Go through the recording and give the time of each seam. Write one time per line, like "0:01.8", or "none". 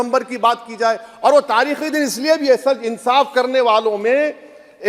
none